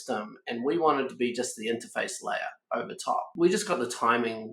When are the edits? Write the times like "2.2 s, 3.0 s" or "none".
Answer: 3.3 s